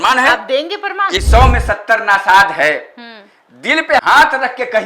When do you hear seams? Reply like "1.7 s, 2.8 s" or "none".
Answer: 1.0 s